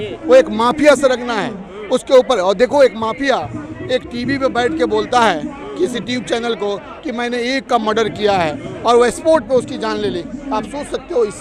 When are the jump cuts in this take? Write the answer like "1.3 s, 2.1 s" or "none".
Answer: none